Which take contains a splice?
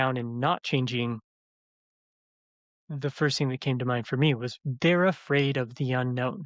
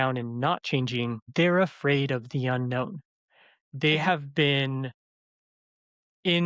second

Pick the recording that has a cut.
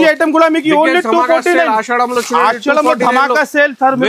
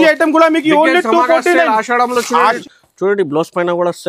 second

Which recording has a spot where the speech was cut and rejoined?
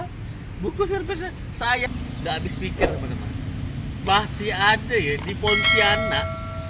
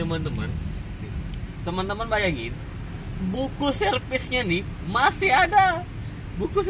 first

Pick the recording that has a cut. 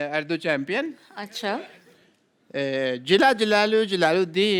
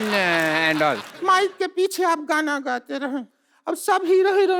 second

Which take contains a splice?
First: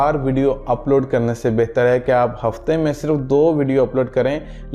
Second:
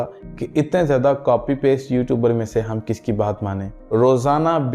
second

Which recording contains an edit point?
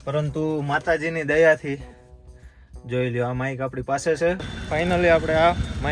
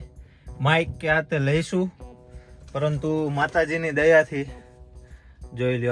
first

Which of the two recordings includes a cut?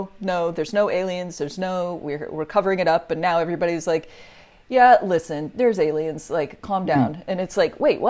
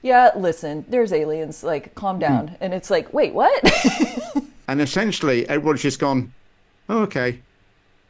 second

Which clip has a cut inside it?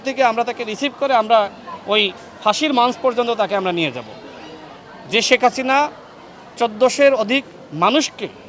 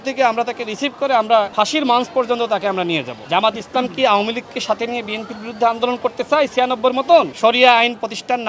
second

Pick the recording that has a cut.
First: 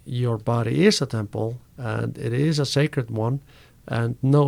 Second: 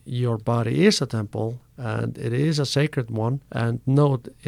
second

